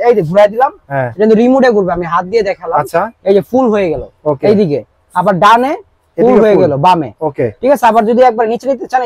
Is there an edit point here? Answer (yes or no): no